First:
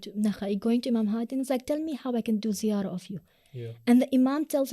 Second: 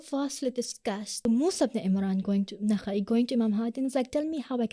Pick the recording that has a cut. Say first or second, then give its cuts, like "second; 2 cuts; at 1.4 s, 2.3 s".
second; 1 cut; at 1.3 s